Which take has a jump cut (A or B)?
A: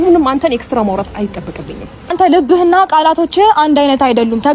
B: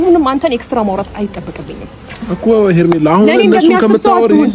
A